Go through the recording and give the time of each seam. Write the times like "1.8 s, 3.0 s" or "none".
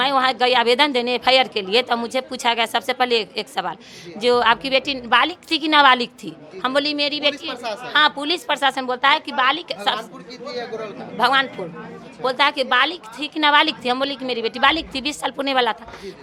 none